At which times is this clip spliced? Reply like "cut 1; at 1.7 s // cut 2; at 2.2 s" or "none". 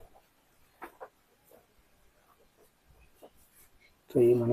none